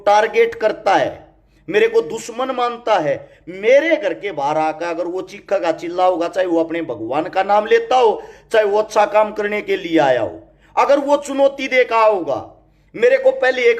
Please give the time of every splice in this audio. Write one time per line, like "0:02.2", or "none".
none